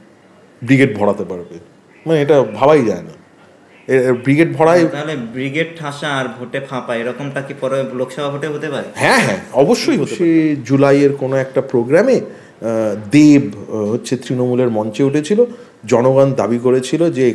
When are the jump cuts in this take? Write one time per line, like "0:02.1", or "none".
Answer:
0:10.1